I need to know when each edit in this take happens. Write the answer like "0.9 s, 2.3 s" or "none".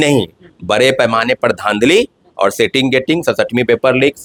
none